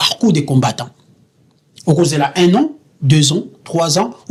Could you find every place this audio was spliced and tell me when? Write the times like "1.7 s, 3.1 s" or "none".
none